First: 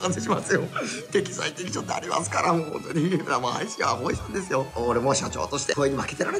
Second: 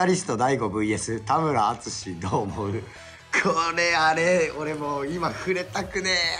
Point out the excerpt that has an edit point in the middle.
first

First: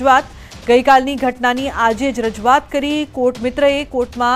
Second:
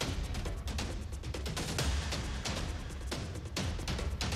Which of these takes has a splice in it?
second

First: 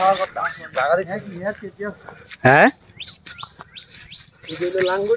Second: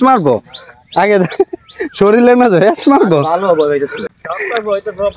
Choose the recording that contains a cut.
second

